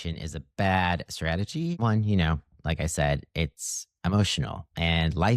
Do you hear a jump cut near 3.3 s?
no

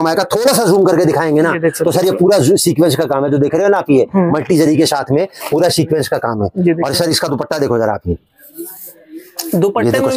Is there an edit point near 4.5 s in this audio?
no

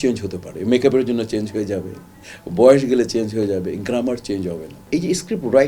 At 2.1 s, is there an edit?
no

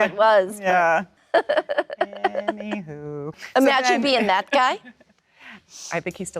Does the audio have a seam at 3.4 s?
yes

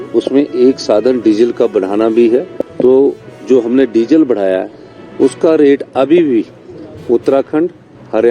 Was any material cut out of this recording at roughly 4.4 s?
no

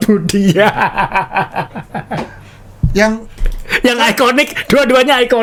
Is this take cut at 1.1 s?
no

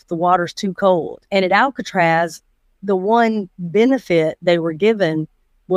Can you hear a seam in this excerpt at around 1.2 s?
yes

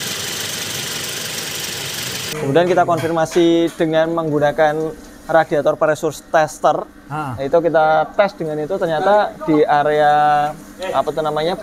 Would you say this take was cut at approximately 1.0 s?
no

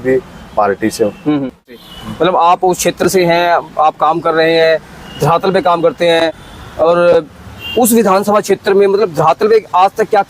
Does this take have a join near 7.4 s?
no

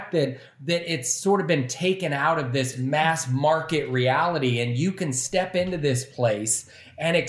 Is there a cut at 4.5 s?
no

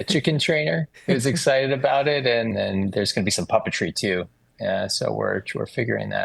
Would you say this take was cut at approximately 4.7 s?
no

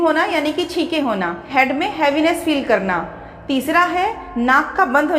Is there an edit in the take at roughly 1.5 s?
yes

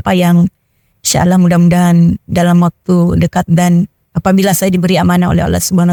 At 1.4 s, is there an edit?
no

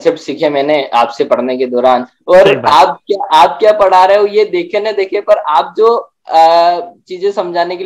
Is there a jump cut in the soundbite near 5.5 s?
no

